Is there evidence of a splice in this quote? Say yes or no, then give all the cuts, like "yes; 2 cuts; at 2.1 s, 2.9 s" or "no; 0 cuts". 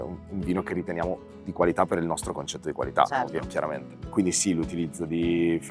no; 0 cuts